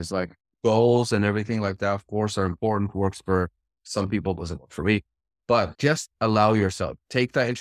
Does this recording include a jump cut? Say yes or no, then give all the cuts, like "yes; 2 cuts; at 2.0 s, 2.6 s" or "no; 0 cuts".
yes; 1 cut; at 5.7 s